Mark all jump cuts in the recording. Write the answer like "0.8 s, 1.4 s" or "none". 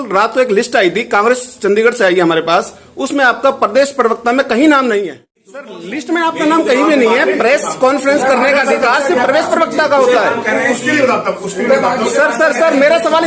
5.6 s